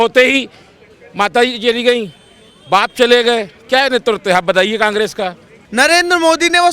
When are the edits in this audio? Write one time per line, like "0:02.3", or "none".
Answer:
0:05.6